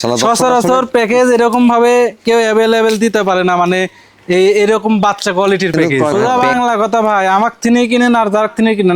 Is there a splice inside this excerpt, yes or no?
yes